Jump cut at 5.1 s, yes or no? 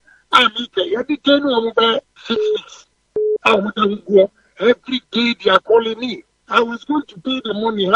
no